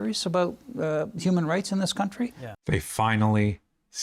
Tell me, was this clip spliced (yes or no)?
yes